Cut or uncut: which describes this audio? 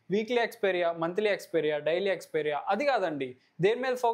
uncut